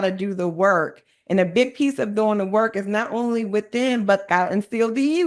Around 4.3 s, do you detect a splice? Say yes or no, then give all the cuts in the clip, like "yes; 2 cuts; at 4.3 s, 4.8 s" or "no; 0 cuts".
yes; 1 cut; at 4.3 s